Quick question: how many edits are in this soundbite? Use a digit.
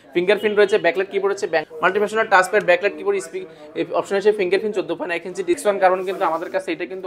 2